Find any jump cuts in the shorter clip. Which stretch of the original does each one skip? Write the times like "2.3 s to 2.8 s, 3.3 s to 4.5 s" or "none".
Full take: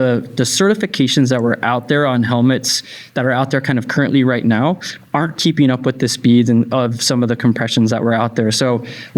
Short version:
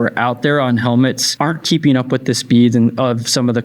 2.7 s to 5.0 s